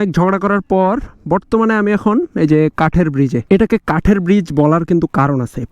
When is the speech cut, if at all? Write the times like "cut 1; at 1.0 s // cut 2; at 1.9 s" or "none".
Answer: cut 1; at 3.4 s